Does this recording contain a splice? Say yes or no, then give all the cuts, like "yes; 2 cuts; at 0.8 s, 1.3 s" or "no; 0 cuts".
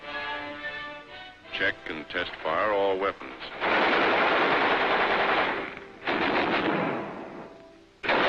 no; 0 cuts